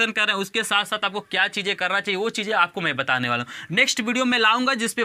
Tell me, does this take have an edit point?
no; 0 cuts

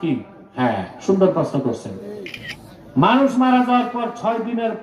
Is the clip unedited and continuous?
no; 1 cut; at 2.3 s

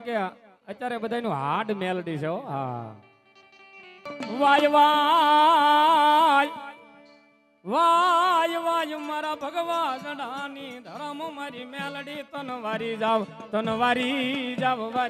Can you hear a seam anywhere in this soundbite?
yes; 1 cut; at 4.1 s

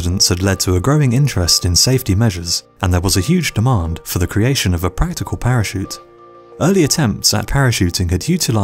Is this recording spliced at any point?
no; 0 cuts

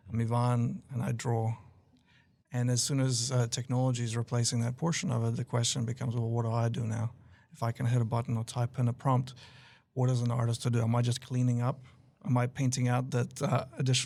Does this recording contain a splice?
no; 0 cuts

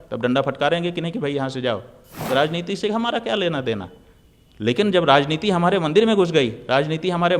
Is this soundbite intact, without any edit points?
no; 1 cut; at 2.2 s

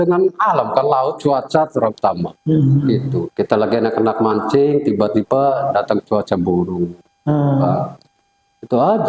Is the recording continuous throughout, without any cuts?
yes; 0 cuts

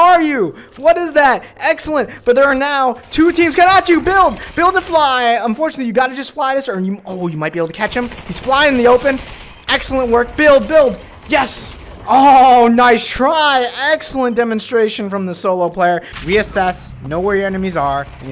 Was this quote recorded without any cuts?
no; 1 cut; at 16.1 s

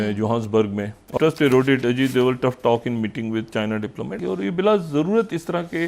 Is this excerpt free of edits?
no; 2 cuts; at 1.1 s, 4.1 s

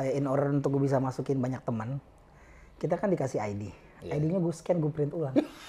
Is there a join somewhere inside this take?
no; 0 cuts

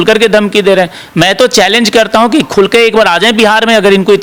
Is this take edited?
no; 0 cuts

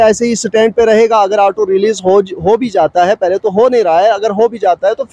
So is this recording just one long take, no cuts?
yes; 0 cuts

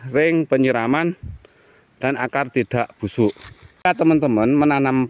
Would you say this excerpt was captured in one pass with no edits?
no; 1 cut; at 3.9 s

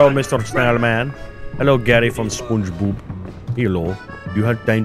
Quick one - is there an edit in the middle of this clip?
no; 0 cuts

